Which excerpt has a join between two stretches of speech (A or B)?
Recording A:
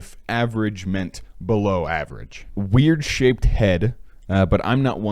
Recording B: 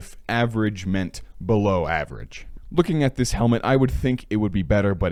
A